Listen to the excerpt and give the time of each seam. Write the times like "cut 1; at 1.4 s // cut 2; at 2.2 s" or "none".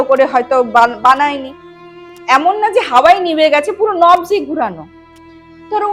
cut 1; at 2.1 s